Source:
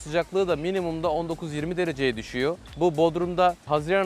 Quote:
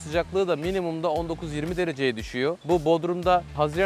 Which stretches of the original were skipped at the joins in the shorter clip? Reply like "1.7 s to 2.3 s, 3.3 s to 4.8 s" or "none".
2.6 s to 2.7 s

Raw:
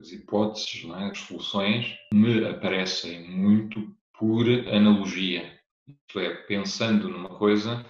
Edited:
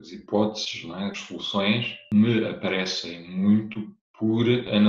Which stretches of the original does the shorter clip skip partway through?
none

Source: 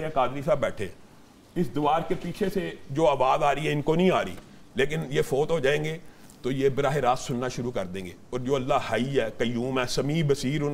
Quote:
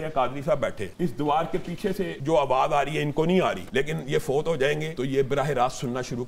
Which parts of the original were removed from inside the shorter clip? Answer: 0.8 s to 1.4 s, 2.7 s to 2.9 s, 4.3 s to 4.7 s, 5.9 s to 6.4 s

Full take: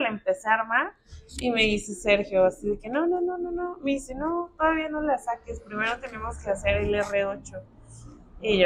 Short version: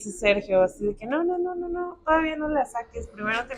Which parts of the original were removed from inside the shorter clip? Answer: 3.8 s to 4.5 s

